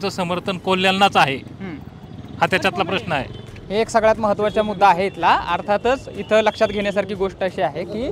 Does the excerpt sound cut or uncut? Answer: uncut